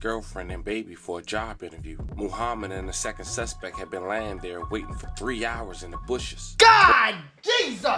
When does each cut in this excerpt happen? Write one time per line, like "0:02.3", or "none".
0:02.0